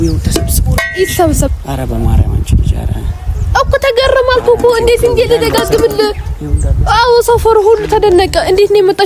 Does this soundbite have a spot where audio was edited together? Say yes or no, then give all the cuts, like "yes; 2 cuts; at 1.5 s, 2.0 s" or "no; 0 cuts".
no; 0 cuts